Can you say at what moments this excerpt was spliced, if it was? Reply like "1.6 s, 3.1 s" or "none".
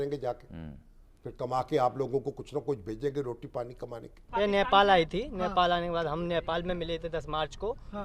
4.2 s